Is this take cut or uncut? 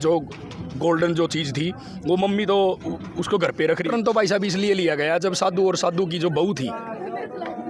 cut